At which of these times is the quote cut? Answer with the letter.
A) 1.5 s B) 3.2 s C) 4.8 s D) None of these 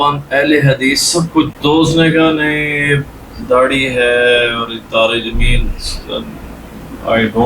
A